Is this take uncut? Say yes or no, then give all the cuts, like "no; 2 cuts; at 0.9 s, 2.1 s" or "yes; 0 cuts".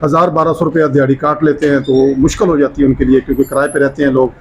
yes; 0 cuts